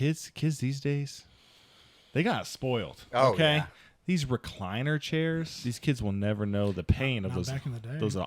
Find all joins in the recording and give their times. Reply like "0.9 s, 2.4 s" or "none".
5.6 s